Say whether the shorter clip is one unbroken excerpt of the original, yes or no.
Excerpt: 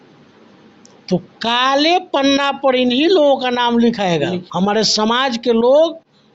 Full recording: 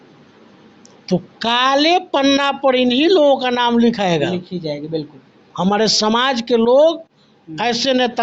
no